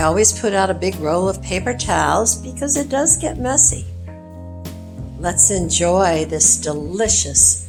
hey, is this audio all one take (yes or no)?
yes